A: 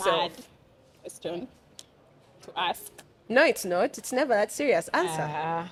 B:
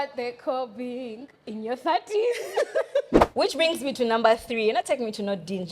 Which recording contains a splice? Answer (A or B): B